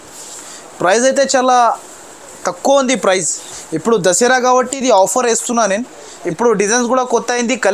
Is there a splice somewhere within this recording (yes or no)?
yes